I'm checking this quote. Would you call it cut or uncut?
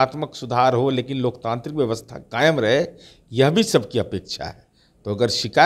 uncut